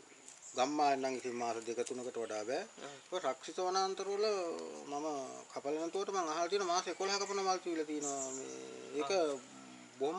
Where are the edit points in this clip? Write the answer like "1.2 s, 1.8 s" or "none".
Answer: none